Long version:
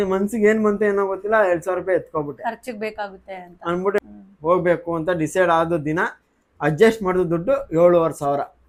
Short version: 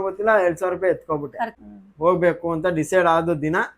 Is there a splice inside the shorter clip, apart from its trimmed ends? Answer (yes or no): yes